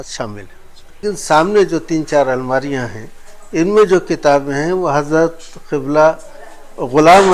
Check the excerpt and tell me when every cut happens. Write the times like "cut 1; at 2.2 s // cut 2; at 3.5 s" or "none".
cut 1; at 1.0 s